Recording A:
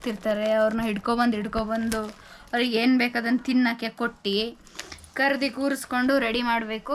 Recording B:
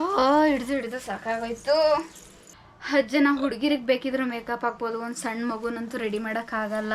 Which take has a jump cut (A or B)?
B